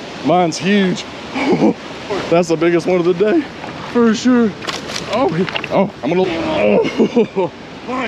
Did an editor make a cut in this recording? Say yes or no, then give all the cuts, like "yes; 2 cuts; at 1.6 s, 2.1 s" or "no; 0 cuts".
yes; 2 cuts; at 2.0 s, 6.2 s